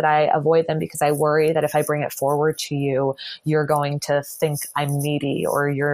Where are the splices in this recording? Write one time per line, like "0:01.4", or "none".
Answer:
none